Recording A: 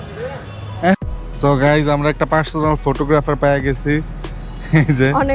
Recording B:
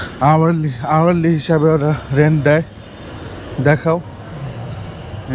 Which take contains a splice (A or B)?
A